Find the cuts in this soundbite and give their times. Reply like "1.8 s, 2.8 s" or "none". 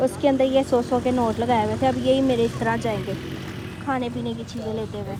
none